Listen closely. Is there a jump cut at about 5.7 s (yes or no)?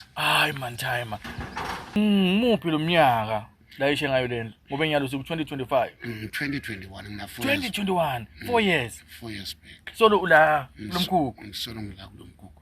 no